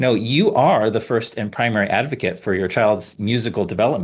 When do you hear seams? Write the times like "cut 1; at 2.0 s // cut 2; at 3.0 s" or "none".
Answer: cut 1; at 3.1 s